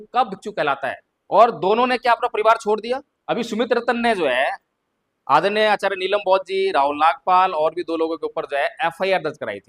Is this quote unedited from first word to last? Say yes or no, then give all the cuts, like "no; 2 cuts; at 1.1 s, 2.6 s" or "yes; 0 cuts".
no; 2 cuts; at 1.1 s, 3.1 s